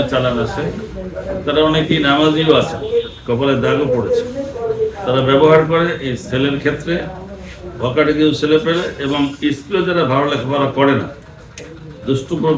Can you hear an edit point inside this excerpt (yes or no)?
no